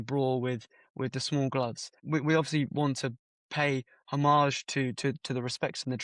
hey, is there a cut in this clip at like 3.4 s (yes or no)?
no